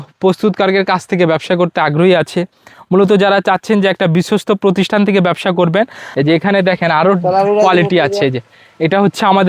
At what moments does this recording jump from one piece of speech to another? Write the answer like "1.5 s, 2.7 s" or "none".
6.0 s